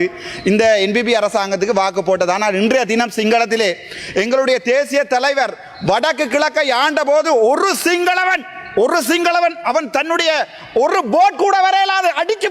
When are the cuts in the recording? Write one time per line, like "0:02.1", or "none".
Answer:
none